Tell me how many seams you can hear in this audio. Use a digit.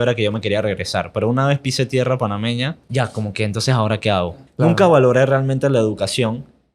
2